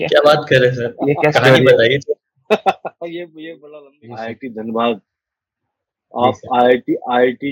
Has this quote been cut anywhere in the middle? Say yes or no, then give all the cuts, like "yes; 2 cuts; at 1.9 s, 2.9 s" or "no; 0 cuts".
yes; 1 cut; at 3.6 s